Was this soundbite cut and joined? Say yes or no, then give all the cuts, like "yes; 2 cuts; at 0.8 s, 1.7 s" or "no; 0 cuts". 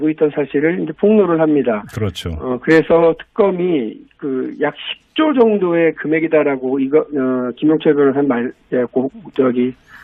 no; 0 cuts